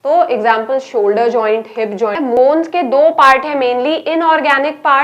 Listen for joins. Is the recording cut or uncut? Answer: cut